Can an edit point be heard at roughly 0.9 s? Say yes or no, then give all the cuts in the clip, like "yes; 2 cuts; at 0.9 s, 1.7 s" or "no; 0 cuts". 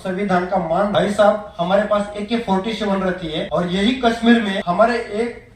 yes; 3 cuts; at 0.9 s, 3.5 s, 4.6 s